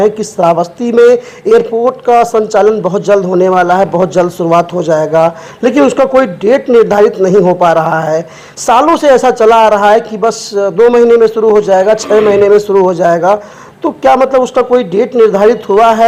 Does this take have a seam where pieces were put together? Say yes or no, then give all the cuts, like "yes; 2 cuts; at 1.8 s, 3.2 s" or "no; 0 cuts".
no; 0 cuts